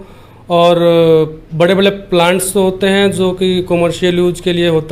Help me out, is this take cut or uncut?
uncut